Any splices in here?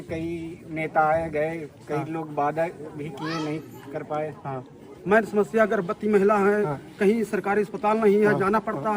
yes; 1 cut; at 4.9 s

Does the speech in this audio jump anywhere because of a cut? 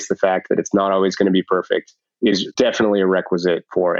yes; 1 cut; at 2.5 s

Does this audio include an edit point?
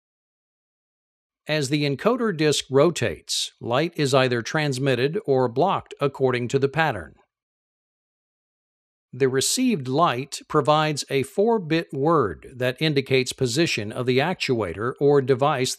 yes; 1 cut; at 5.5 s

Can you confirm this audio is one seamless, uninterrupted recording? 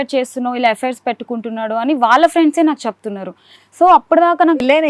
yes; 0 cuts

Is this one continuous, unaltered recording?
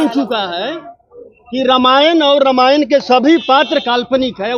yes; 0 cuts

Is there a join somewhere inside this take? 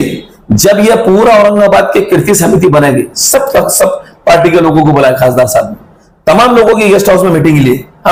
no; 0 cuts

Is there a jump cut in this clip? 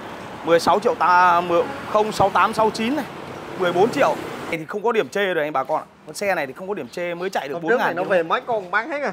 yes; 1 cut; at 4.6 s

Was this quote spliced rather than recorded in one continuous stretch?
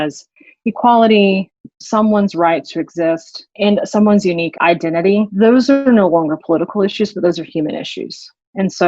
yes; 3 cuts; at 1.6 s, 3.5 s, 4.7 s

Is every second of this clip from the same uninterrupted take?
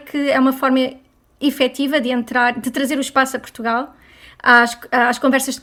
yes; 0 cuts

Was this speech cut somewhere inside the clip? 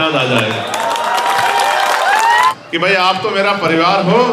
yes; 1 cut; at 2.5 s

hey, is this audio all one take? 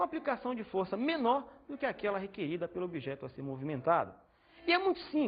no; 1 cut; at 1.3 s

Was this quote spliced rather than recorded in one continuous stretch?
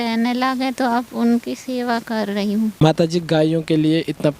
yes; 1 cut; at 2.9 s

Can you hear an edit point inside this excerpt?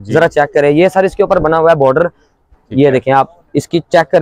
no; 0 cuts

